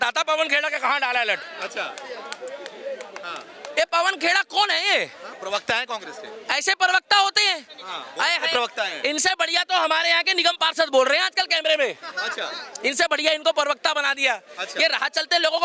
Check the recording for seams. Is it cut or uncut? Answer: uncut